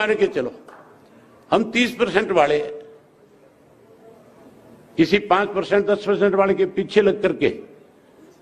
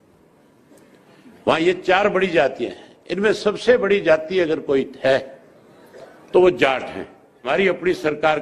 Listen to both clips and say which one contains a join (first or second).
second